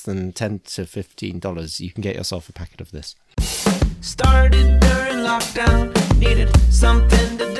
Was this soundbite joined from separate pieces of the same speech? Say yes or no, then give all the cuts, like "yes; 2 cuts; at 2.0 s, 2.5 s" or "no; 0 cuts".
yes; 1 cut; at 3.2 s